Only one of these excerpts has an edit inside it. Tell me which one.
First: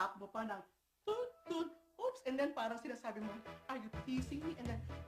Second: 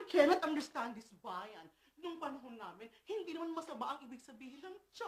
second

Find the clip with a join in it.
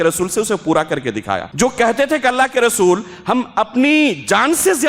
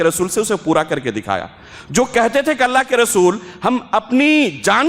first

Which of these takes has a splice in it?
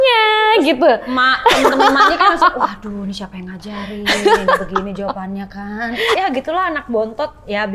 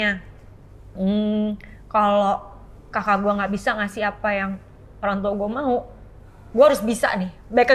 first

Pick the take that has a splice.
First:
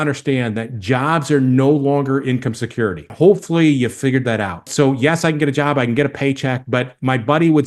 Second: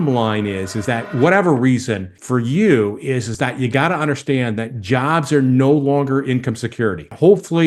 first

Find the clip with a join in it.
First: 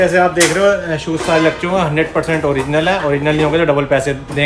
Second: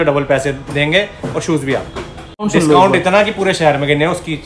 second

